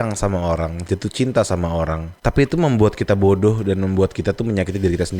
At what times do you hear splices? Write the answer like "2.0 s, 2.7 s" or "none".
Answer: none

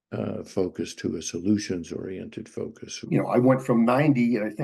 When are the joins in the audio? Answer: 3.1 s

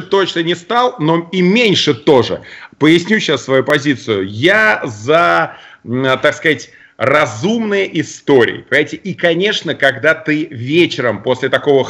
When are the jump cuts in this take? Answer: none

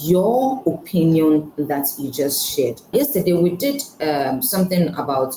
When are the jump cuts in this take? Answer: 2.9 s

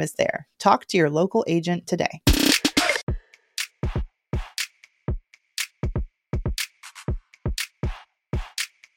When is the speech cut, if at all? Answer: 3.0 s

